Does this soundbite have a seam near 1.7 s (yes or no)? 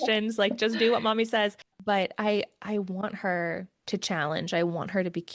yes